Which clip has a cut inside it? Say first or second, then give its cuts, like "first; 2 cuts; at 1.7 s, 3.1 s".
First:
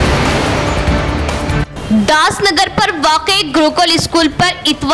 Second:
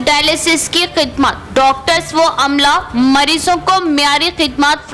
first; 1 cut; at 1.6 s